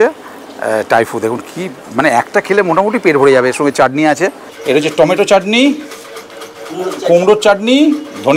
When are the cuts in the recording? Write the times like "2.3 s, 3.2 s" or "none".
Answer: 4.5 s